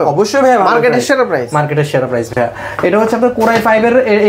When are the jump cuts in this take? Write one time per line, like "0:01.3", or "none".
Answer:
none